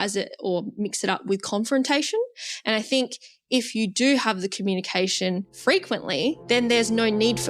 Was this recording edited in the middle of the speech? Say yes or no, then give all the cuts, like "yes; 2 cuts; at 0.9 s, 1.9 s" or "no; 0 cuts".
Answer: yes; 2 cuts; at 5.5 s, 6.4 s